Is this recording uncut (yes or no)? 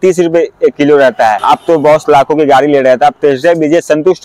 no